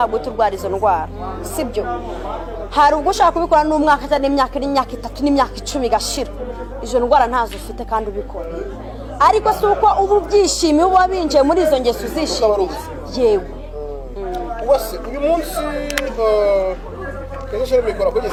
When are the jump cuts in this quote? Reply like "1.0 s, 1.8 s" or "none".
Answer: none